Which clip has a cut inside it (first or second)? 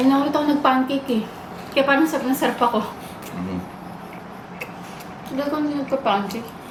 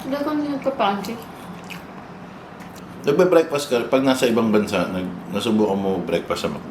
second